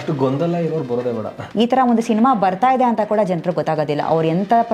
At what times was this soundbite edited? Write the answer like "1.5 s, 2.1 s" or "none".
1.4 s